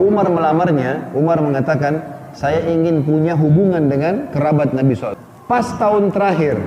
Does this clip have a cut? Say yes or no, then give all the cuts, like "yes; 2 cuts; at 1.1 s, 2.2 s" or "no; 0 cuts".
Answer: yes; 1 cut; at 5.1 s